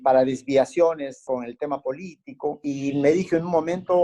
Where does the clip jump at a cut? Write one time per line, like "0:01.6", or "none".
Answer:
0:01.2
0:02.6